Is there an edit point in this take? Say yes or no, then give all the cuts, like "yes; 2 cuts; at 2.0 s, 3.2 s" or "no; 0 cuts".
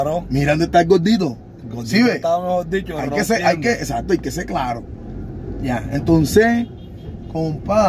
no; 0 cuts